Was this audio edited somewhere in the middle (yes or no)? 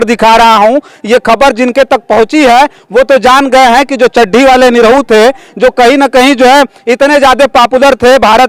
no